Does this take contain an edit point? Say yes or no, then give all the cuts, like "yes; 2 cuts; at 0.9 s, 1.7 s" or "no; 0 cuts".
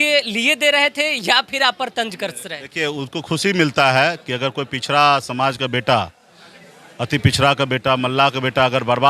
no; 0 cuts